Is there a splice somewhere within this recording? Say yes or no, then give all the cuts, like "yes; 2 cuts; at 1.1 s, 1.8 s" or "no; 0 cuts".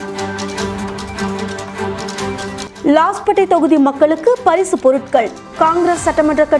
yes; 1 cut; at 2.7 s